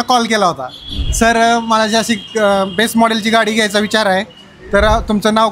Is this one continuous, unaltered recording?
yes; 0 cuts

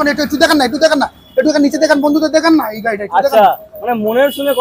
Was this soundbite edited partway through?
no; 0 cuts

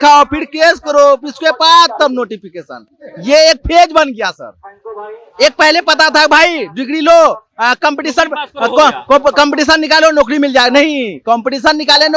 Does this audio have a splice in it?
no; 0 cuts

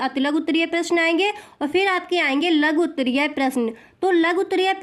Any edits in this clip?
no; 0 cuts

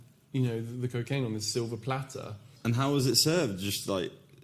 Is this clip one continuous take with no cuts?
no; 1 cut; at 2.4 s

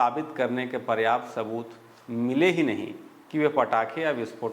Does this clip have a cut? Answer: no; 0 cuts

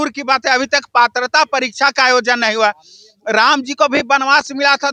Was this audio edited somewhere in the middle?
no; 0 cuts

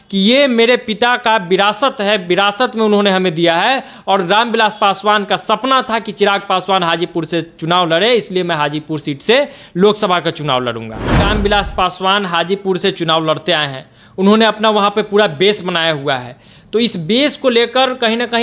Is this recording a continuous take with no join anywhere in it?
no; 1 cut; at 11.2 s

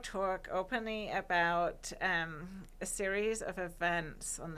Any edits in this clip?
no; 0 cuts

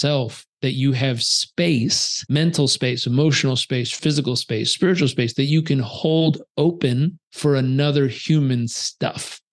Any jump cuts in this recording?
yes; 3 cuts; at 2.1 s, 4.0 s, 7.2 s

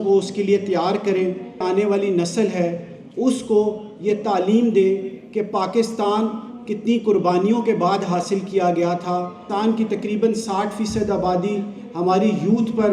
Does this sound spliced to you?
yes; 2 cuts; at 1.6 s, 9.5 s

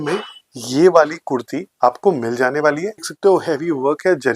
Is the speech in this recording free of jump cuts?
no; 1 cut; at 3.1 s

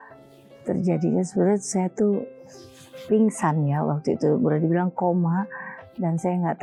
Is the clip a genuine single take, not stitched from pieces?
yes; 0 cuts

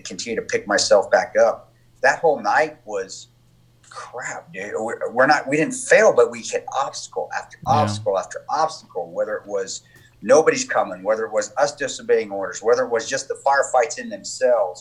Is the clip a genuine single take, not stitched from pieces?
yes; 0 cuts

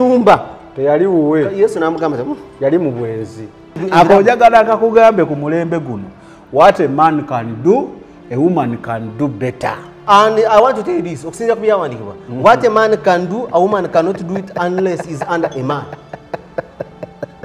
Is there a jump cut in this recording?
yes; 1 cut; at 3.8 s

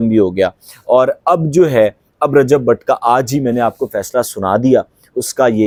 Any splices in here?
no; 0 cuts

